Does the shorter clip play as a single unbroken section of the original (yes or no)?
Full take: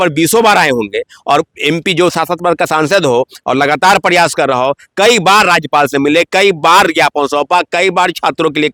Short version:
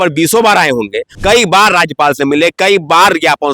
no